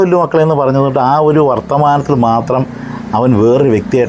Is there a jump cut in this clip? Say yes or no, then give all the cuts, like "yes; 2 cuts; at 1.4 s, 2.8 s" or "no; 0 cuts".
no; 0 cuts